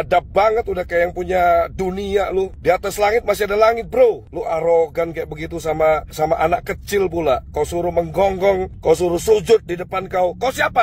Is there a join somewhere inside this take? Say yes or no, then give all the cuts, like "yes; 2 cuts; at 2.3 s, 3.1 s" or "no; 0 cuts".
no; 0 cuts